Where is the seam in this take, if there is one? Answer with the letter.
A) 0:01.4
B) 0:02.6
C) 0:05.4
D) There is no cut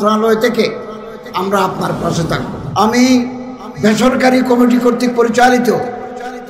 B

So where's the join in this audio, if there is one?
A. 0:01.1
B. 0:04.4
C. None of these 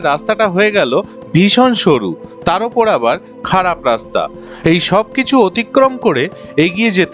B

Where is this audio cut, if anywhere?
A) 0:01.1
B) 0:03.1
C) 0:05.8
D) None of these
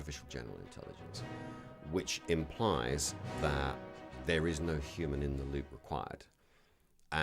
D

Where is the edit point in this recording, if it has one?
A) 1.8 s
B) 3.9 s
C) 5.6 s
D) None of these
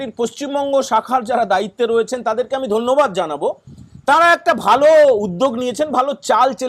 D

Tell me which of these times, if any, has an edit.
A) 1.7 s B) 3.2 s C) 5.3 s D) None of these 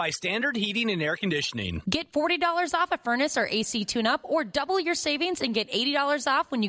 A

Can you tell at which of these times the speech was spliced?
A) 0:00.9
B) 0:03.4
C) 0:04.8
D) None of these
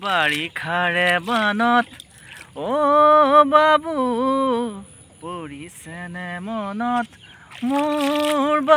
D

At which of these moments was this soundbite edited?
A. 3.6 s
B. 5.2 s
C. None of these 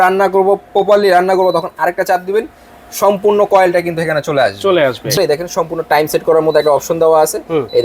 B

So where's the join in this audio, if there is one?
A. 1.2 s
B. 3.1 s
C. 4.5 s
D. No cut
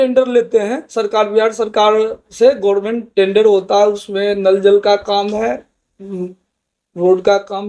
D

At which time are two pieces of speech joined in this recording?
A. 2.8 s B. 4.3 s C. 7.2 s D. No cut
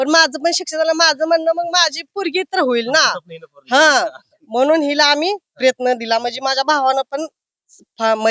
D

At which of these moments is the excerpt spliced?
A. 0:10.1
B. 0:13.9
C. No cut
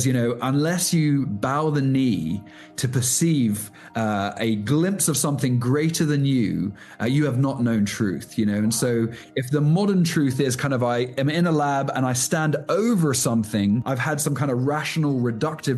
B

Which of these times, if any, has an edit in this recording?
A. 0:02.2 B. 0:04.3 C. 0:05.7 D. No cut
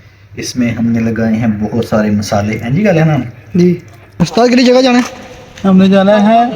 B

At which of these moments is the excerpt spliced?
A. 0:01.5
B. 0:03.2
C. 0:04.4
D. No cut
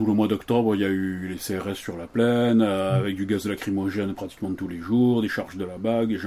D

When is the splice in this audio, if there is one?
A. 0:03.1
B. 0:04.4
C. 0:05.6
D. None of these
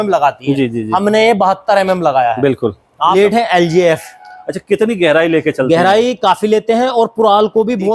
A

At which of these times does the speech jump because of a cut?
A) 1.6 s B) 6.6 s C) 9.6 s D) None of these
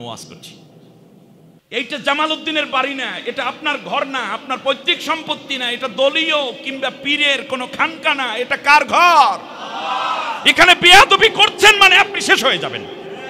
A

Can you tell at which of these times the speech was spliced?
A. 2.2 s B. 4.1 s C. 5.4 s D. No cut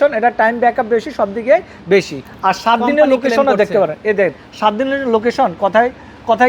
A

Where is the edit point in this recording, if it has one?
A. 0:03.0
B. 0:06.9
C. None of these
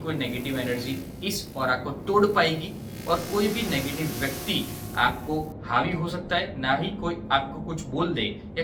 C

